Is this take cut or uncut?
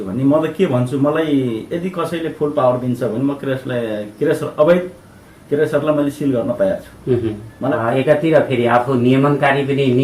cut